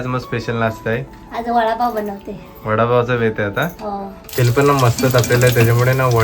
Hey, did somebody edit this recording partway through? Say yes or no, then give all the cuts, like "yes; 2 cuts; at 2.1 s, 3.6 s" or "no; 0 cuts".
yes; 1 cut; at 4.2 s